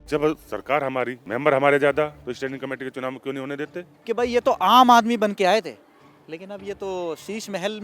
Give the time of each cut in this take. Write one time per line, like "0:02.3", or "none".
0:01.2
0:02.2
0:03.9